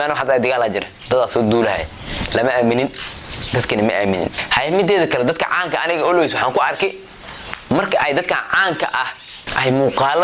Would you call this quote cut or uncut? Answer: cut